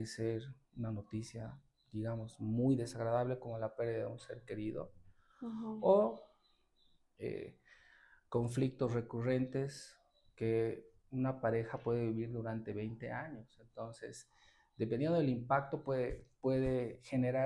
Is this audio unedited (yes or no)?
yes